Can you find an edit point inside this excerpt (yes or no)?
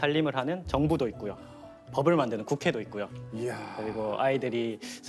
no